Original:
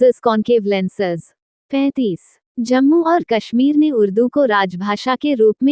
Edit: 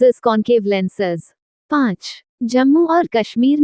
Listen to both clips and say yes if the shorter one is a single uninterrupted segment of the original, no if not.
no